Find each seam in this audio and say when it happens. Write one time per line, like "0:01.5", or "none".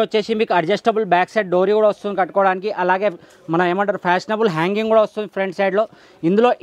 none